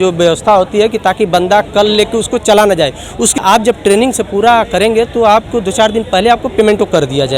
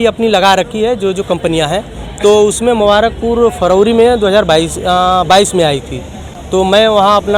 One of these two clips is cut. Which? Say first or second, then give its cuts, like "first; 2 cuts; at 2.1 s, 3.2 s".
first; 1 cut; at 3.5 s